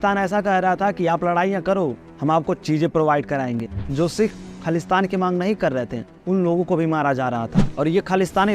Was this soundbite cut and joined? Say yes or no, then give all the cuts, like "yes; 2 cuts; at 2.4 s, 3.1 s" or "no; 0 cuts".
yes; 2 cuts; at 3.6 s, 7.6 s